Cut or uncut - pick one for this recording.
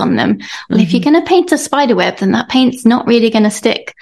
uncut